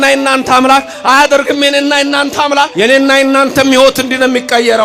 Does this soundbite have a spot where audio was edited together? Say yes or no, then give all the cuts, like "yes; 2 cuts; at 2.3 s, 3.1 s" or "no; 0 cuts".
yes; 1 cut; at 2.7 s